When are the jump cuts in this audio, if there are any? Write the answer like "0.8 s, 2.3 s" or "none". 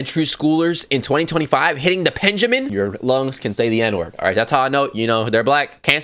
2.6 s